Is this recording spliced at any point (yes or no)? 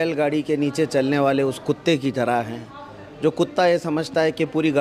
no